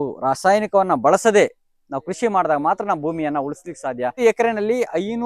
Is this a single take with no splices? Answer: no; 1 cut; at 4.2 s

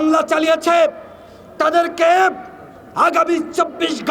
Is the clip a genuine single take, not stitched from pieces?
yes; 0 cuts

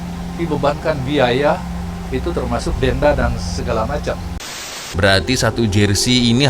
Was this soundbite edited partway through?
yes; 1 cut; at 4.5 s

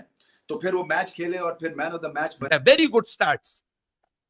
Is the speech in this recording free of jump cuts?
no; 1 cut; at 2.4 s

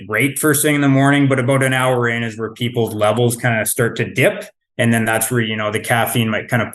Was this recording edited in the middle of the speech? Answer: no; 0 cuts

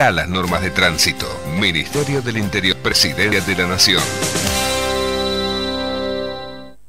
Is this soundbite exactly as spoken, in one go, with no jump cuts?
no; 1 cut; at 2.9 s

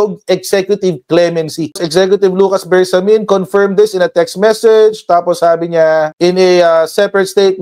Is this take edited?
no; 0 cuts

